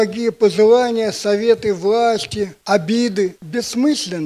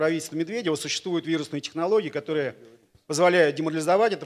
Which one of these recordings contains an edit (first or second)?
first